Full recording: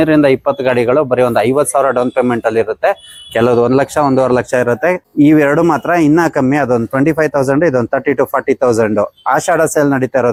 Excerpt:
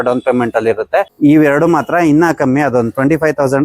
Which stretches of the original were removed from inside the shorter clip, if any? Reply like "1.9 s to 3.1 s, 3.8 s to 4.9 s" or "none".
3.0 s to 5.1 s